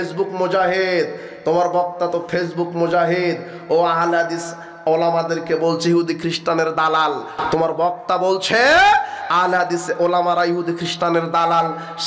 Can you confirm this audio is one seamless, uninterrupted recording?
yes; 0 cuts

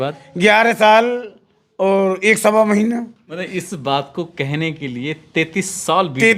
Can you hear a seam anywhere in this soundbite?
yes; 1 cut; at 3.3 s

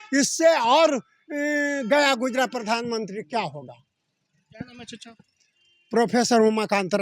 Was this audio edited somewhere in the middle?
no; 0 cuts

